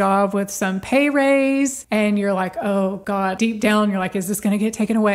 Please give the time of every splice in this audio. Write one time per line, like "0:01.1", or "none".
0:01.8
0:03.1